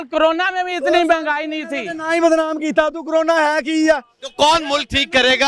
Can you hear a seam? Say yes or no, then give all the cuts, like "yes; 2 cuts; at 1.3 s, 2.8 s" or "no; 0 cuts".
no; 0 cuts